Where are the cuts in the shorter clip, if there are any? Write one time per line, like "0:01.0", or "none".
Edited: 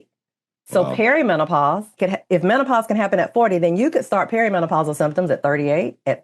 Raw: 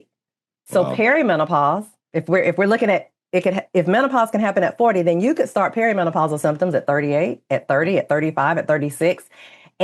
0:02.0